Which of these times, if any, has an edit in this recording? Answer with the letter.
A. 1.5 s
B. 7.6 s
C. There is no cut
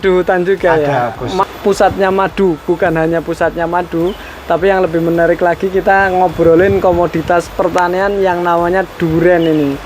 A